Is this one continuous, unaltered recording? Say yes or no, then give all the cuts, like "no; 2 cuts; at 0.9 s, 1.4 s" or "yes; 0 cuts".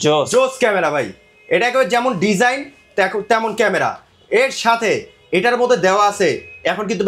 yes; 0 cuts